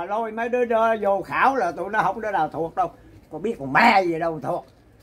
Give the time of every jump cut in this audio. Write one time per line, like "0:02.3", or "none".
none

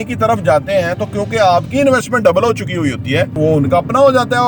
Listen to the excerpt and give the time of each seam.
0:03.4

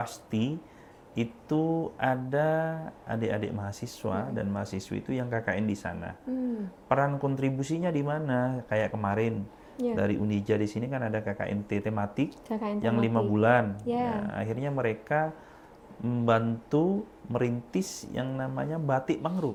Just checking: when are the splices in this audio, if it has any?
none

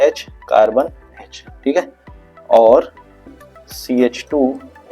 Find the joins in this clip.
0:03.3

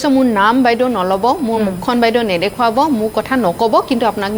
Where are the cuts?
none

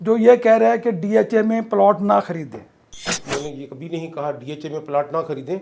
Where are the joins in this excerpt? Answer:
0:02.9

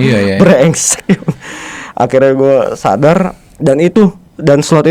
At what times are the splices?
0:03.4

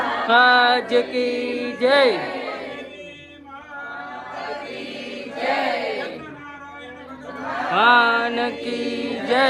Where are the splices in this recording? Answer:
none

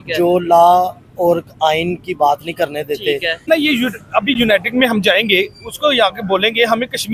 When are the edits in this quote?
0:03.6

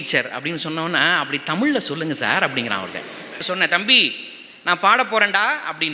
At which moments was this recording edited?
0:03.4

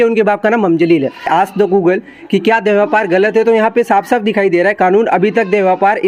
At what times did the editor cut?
0:01.3

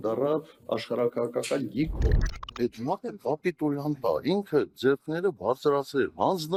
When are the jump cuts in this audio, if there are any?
none

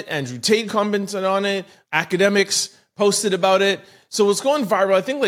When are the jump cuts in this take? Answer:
0:01.9

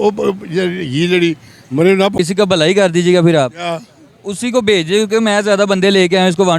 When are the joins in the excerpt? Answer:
0:02.1

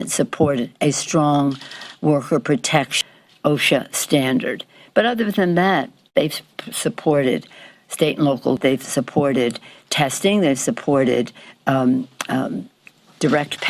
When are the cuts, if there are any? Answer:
0:03.0
0:08.6

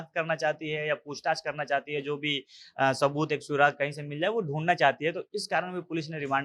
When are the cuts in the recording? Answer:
none

